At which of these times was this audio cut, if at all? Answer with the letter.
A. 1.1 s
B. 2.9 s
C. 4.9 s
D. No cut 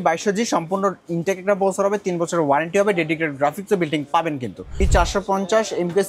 C